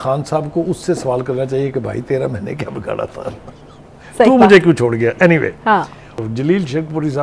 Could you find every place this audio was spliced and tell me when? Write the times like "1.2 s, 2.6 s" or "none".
6.2 s

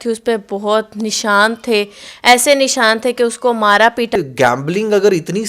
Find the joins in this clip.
4.1 s

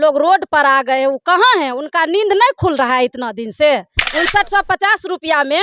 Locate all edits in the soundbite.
4.0 s

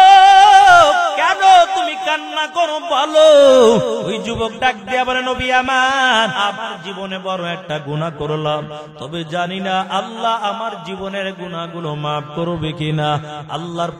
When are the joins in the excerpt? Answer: 1.2 s, 4.2 s, 6.3 s

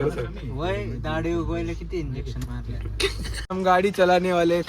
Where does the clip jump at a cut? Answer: 3.4 s

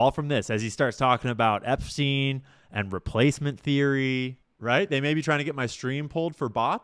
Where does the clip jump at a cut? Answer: 4.4 s

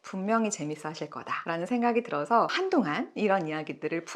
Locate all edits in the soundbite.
none

